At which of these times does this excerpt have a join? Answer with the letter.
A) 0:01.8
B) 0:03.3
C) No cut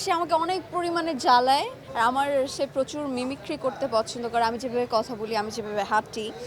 A